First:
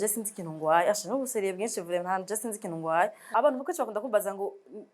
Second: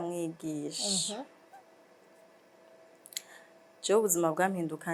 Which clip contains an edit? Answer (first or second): first